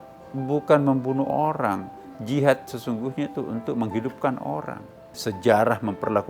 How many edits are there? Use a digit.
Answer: 1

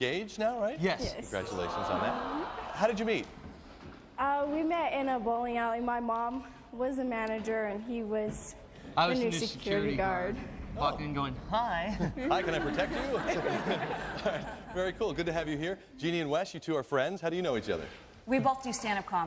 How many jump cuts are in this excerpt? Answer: 1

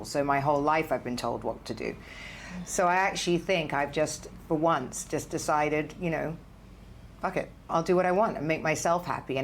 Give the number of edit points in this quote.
1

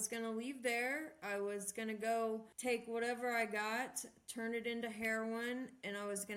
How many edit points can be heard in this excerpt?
1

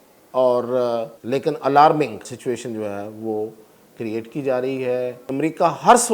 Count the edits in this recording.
3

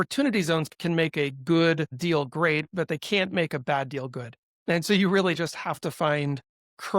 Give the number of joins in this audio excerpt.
0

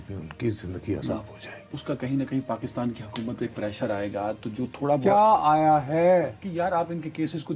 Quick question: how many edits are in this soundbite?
1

